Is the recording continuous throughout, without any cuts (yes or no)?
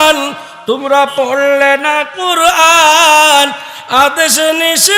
yes